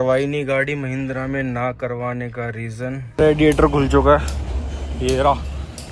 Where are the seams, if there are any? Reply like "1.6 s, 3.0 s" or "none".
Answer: 3.1 s

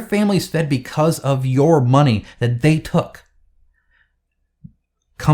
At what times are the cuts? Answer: none

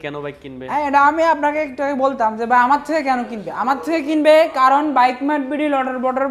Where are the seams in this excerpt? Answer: none

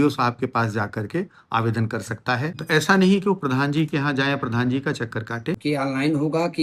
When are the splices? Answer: 2.5 s, 5.6 s

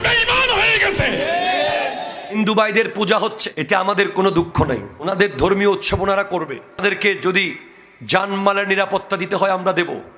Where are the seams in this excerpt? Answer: 2.2 s

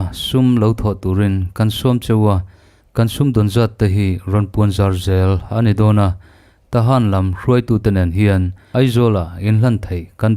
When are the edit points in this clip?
8.6 s

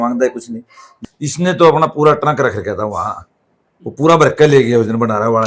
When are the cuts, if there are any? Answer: 1.0 s

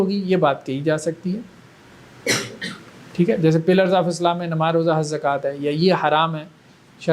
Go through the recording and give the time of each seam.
none

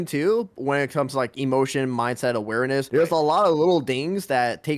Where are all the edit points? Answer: 2.9 s

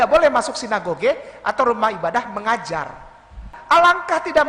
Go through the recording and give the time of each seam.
3.5 s

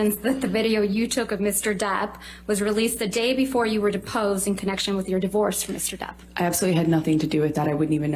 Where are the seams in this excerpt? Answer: none

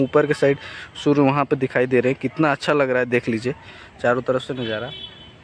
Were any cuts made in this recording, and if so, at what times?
none

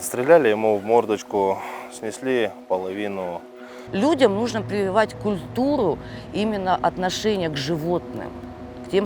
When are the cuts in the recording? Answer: 3.8 s

